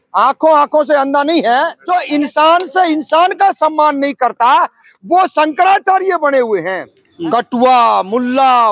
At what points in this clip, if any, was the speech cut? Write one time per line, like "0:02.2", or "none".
0:01.8
0:07.0